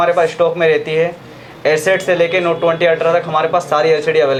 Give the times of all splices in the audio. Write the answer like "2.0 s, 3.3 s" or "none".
none